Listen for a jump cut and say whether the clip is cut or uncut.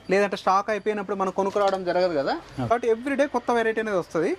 cut